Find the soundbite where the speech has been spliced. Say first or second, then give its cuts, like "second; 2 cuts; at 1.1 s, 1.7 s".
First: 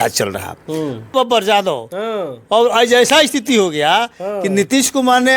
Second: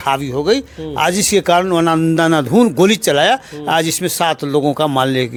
first; 1 cut; at 1.1 s